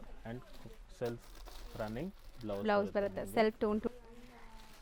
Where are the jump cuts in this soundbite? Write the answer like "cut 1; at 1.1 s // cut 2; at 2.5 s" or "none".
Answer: cut 1; at 3.9 s